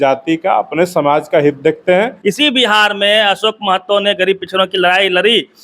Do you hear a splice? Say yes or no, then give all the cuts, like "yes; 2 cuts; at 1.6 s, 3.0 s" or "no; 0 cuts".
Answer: yes; 1 cut; at 2.1 s